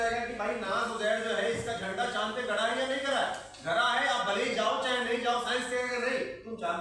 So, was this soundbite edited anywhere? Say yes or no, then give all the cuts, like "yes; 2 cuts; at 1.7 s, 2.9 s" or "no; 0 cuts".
no; 0 cuts